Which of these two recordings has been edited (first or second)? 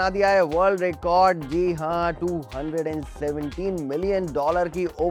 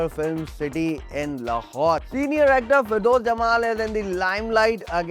second